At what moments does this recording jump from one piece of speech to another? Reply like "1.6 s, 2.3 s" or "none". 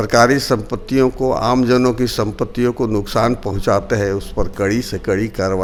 none